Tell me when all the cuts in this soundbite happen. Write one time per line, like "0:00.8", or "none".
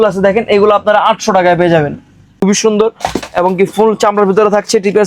0:02.4